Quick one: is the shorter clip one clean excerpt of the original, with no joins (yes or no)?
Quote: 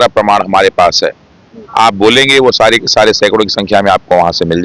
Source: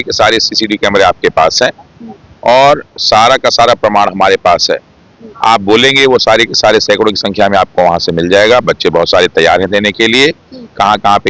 yes